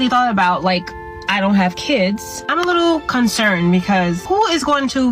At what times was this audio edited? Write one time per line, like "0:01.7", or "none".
0:02.4
0:04.2